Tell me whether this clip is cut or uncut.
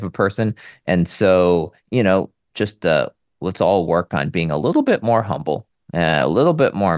uncut